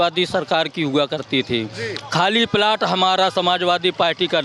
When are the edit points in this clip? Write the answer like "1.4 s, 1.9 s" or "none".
none